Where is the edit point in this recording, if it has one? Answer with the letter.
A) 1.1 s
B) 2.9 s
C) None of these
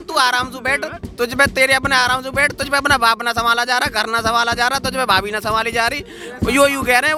C